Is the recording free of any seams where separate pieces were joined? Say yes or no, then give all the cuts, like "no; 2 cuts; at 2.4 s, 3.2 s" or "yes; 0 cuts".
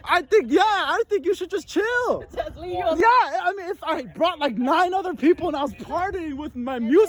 yes; 0 cuts